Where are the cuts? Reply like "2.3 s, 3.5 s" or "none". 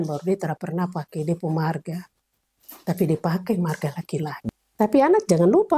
4.4 s